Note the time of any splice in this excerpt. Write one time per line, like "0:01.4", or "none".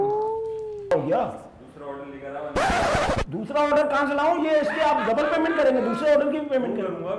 0:00.9